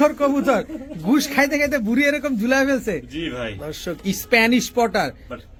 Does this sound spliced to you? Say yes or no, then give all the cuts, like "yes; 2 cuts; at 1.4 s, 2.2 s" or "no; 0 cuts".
no; 0 cuts